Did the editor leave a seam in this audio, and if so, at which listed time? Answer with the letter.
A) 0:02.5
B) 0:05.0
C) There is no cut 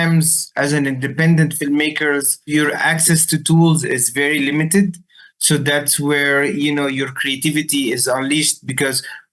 A